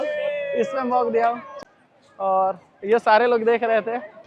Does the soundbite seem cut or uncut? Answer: cut